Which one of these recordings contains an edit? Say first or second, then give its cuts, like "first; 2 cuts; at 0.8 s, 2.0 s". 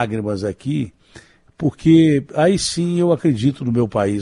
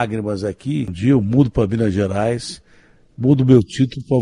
second; 1 cut; at 0.9 s